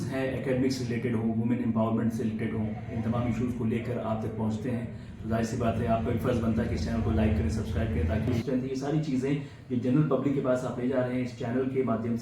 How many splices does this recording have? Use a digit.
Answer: 1